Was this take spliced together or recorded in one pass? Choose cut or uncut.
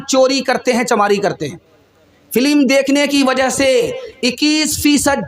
cut